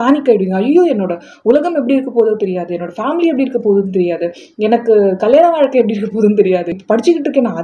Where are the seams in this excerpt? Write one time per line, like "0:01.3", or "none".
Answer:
0:06.7